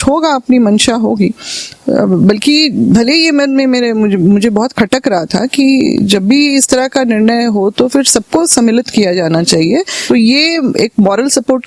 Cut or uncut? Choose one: cut